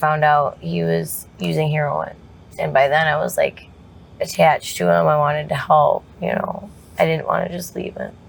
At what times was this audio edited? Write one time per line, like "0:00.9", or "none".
none